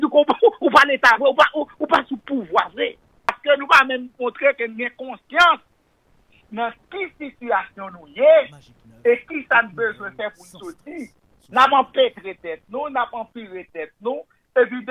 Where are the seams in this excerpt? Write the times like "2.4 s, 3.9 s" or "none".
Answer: 3.3 s